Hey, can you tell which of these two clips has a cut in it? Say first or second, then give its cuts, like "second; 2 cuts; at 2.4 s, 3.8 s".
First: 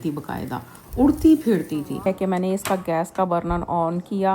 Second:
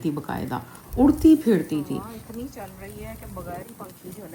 first; 1 cut; at 2.1 s